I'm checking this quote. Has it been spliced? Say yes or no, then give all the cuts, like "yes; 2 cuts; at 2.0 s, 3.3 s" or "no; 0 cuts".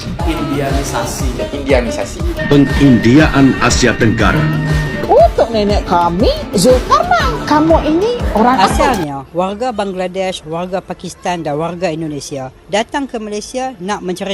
yes; 1 cut; at 8.6 s